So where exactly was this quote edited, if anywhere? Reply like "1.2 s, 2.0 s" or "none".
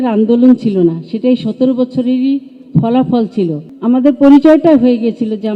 3.7 s